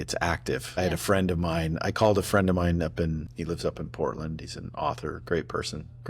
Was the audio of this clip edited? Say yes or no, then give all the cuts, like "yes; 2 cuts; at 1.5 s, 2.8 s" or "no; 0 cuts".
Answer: yes; 3 cuts; at 0.8 s, 3.3 s, 5.2 s